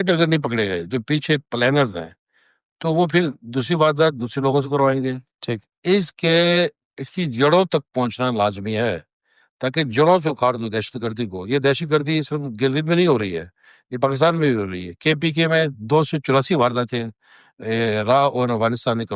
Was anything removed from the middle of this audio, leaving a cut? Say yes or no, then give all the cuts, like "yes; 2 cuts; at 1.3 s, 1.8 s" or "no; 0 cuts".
no; 0 cuts